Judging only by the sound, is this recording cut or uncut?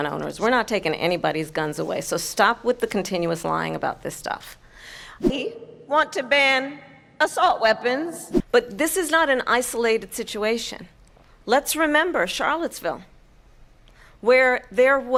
uncut